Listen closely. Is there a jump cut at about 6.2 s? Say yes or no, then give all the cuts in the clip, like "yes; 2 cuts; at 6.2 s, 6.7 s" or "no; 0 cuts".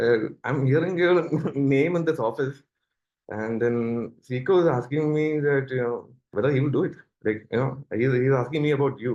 yes; 1 cut; at 6.2 s